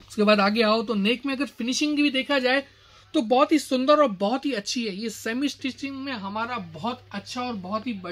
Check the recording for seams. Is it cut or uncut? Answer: uncut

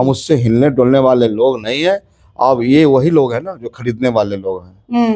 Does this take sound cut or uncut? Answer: uncut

